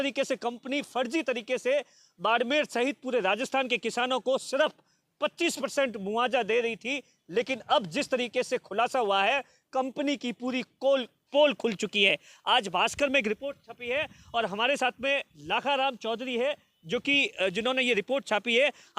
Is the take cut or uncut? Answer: uncut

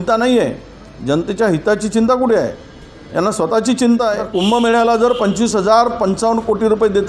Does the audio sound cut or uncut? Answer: cut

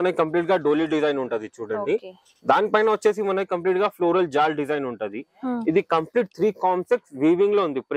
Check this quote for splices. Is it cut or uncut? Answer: uncut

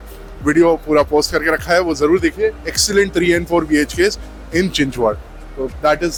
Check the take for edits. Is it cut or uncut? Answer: uncut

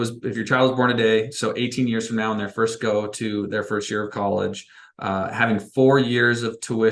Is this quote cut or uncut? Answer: uncut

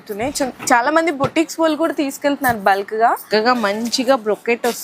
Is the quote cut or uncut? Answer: cut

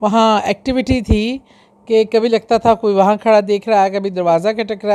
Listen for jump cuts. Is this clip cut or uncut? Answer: uncut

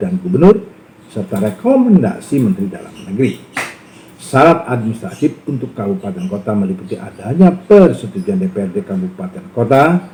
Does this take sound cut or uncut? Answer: uncut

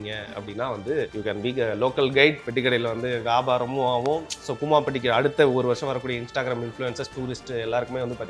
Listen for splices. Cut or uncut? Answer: uncut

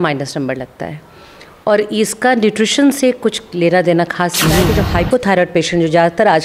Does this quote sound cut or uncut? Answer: cut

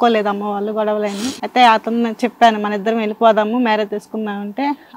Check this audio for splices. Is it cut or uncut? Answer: cut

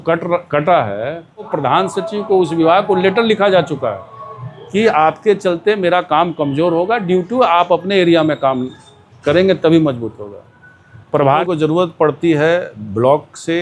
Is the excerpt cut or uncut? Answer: cut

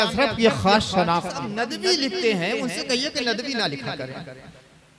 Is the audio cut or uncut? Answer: cut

